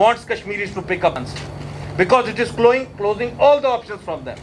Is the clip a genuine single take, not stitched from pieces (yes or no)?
no